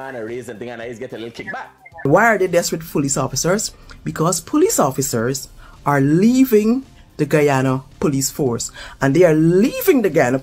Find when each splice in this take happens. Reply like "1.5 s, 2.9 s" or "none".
2.0 s